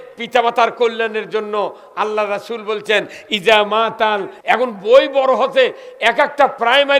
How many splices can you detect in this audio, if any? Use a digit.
1